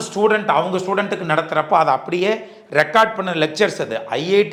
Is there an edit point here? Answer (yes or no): no